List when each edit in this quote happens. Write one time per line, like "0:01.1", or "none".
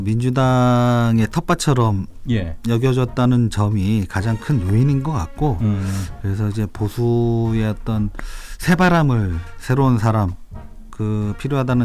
0:09.4

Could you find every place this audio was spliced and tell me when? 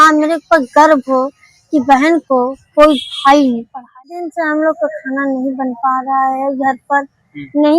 0:04.2

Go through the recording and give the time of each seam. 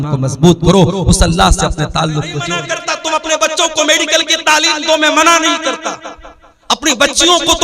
0:02.7

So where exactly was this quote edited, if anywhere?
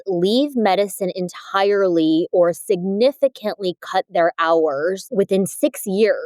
0:05.1

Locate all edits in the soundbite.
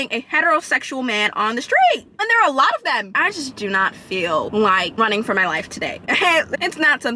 0:02.2
0:03.1

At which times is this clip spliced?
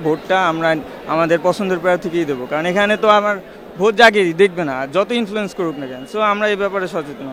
none

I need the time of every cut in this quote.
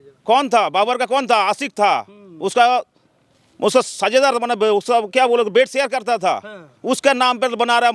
none

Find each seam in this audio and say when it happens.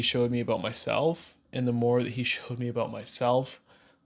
none

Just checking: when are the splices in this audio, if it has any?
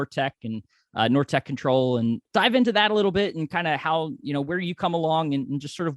0:02.2

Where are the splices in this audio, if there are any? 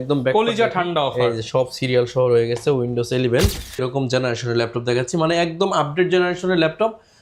0:03.8

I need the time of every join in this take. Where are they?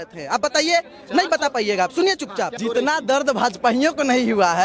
0:02.6

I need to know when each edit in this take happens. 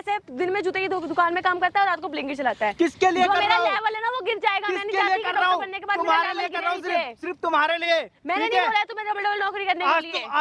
none

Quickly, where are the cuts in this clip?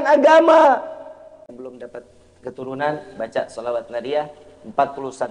0:01.5

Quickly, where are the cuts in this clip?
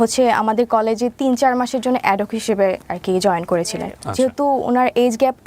0:04.0

